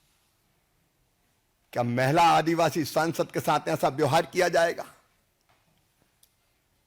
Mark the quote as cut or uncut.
uncut